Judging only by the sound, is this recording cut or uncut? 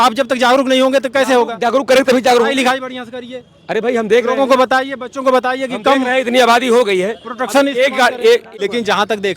cut